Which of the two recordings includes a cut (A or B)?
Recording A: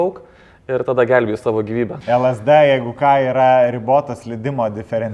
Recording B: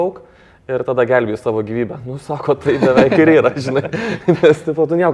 A